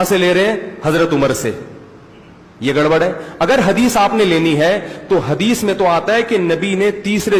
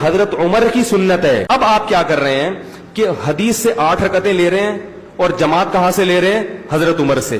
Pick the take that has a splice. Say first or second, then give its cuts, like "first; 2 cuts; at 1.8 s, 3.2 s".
second; 1 cut; at 1.4 s